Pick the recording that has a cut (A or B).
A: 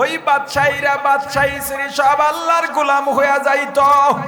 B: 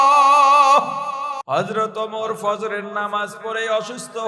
B